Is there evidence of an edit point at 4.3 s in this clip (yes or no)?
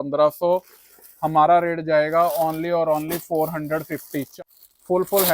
yes